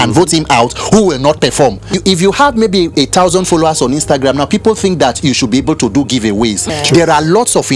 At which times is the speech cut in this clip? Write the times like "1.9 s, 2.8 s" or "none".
2.0 s, 6.7 s